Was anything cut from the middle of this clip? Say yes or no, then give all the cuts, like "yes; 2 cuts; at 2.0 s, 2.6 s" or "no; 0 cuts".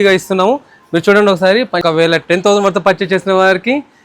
yes; 1 cut; at 1.8 s